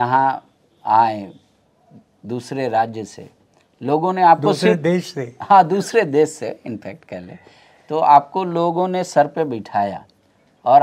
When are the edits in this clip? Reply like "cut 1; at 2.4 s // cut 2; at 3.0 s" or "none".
none

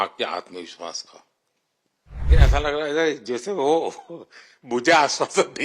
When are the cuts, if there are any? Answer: cut 1; at 2.3 s

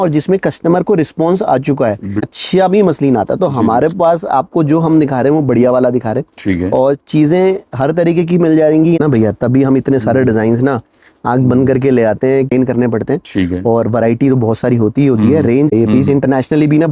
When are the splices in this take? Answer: cut 1; at 2.3 s // cut 2; at 9.0 s // cut 3; at 12.5 s // cut 4; at 15.7 s

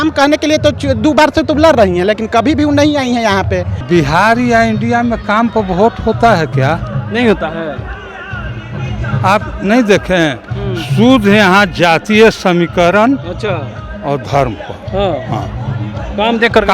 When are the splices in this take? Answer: cut 1; at 3.7 s

